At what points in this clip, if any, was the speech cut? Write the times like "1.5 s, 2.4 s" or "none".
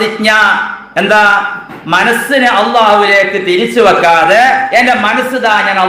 none